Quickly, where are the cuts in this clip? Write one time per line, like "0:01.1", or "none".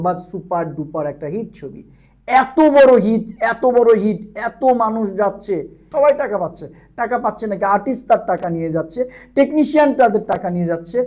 0:05.8